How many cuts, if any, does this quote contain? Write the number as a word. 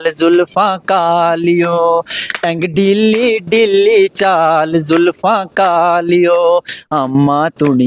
zero